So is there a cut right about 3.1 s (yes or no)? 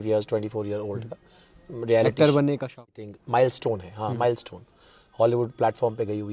yes